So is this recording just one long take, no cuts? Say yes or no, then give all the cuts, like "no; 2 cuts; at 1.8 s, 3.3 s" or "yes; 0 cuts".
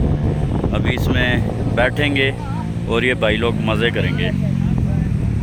yes; 0 cuts